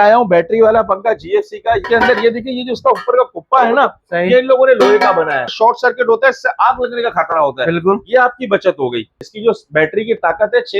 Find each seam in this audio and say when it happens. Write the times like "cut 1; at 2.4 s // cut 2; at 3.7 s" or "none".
cut 1; at 1.8 s // cut 2; at 5.5 s // cut 3; at 9.2 s